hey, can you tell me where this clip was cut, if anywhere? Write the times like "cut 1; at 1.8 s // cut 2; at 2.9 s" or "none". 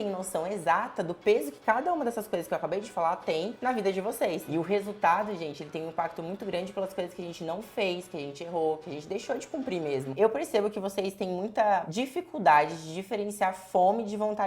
cut 1; at 4.4 s // cut 2; at 10.1 s